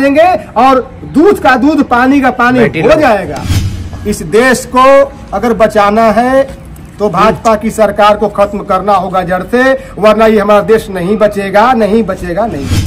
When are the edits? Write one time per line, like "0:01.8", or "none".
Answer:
0:03.7